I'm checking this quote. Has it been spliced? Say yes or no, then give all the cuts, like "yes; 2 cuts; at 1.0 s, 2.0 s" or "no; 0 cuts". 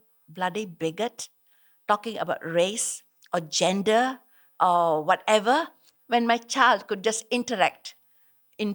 no; 0 cuts